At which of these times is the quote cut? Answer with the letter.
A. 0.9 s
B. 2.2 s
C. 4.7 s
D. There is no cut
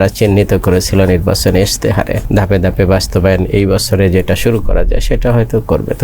B